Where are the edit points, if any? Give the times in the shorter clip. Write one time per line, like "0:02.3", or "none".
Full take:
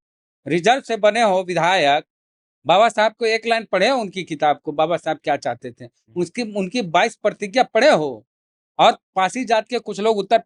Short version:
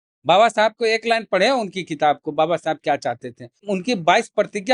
0:03.6